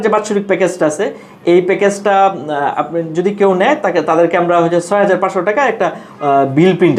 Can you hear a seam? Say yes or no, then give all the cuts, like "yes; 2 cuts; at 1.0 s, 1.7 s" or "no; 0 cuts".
no; 0 cuts